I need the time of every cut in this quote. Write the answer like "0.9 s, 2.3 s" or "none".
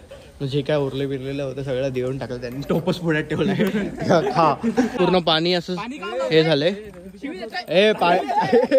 4.9 s

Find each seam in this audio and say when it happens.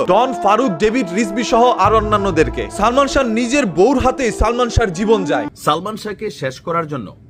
5.5 s

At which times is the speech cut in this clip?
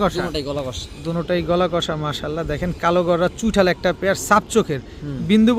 none

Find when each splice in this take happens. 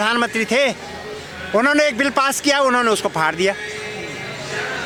none

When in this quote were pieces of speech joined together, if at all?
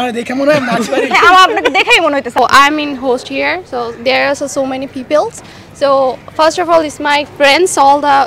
2.4 s

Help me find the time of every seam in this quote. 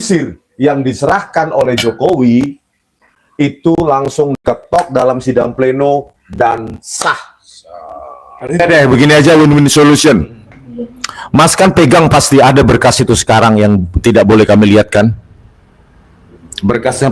8.6 s

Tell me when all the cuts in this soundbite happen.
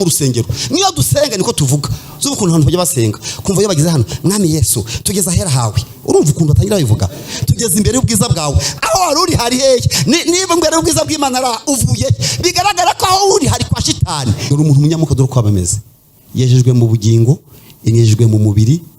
14.4 s

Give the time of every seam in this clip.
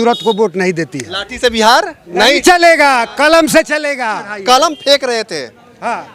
4.3 s

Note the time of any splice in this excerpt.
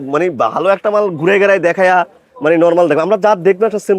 none

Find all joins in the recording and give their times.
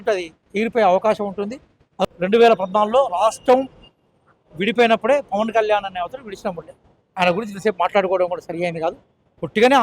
2.1 s

